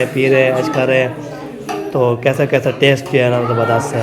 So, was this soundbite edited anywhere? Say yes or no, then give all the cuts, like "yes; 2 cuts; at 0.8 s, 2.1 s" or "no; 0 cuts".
no; 0 cuts